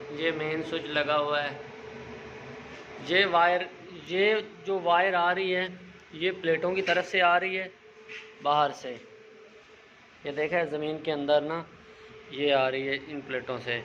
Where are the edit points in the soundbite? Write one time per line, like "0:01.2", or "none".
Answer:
none